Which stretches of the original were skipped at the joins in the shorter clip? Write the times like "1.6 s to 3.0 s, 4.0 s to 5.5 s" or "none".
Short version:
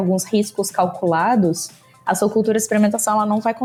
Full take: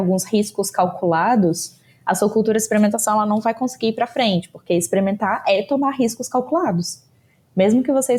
none